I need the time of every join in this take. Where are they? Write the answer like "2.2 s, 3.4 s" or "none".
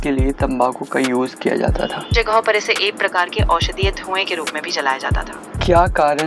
2.1 s, 5.5 s